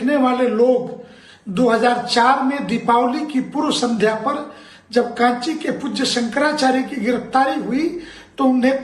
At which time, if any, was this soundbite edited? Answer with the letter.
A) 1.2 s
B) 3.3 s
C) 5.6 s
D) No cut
B